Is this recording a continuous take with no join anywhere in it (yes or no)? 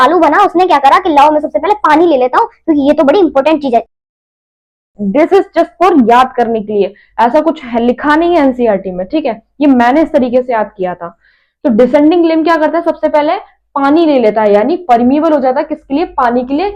yes